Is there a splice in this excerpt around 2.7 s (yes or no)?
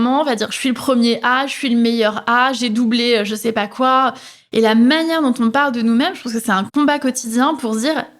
no